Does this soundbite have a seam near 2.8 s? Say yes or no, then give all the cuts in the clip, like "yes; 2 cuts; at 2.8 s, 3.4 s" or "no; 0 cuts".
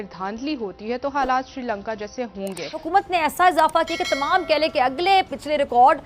yes; 1 cut; at 2.8 s